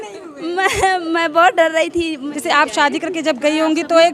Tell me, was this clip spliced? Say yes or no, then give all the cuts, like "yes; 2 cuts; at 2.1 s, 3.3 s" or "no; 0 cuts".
yes; 1 cut; at 2.3 s